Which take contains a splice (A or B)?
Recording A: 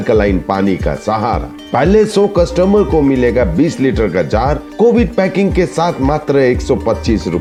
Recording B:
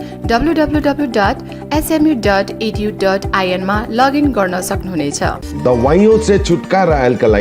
B